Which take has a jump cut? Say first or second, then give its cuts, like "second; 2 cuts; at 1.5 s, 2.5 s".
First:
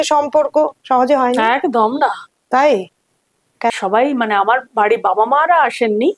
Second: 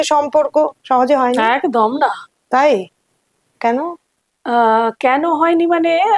first; 1 cut; at 3.7 s